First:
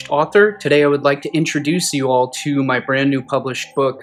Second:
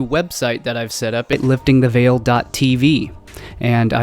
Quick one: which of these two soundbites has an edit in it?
second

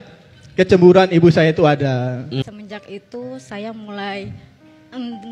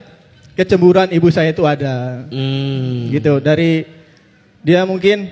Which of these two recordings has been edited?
first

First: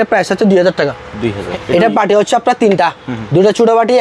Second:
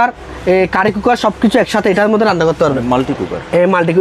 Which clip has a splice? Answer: first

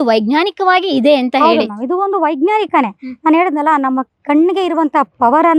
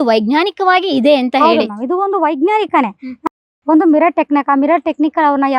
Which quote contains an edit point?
second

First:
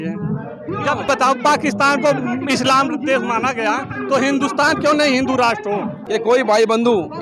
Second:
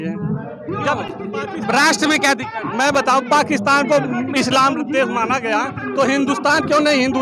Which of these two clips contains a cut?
first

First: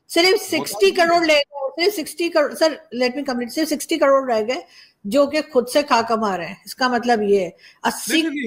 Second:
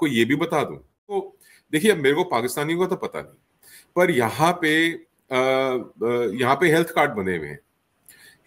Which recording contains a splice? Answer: second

